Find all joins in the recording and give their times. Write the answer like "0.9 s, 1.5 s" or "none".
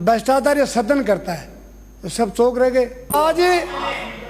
3.1 s